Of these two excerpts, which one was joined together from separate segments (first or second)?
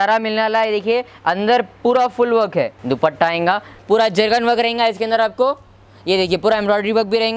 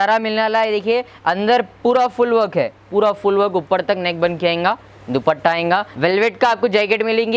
first